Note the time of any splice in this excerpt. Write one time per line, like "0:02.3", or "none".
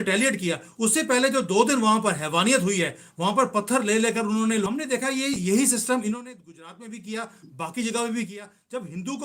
none